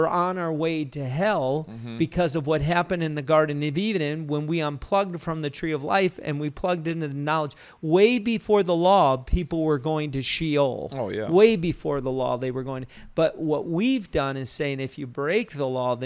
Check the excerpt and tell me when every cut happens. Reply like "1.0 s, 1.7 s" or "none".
none